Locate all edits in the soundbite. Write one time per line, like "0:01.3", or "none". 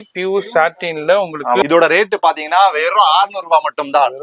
0:01.6